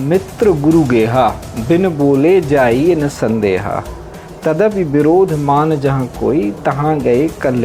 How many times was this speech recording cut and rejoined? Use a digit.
0